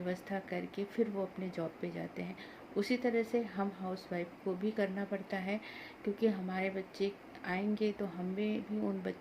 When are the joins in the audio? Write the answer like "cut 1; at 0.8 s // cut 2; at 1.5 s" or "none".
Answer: none